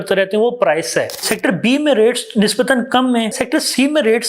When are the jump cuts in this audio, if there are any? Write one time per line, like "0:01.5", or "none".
0:01.3
0:03.3